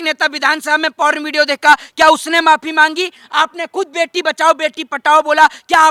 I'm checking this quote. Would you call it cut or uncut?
uncut